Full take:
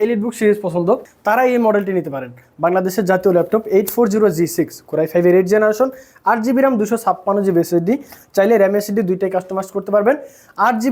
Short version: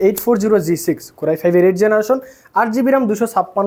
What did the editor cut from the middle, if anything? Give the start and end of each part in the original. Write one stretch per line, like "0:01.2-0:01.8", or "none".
none